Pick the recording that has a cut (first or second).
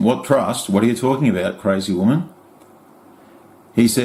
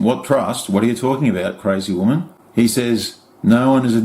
second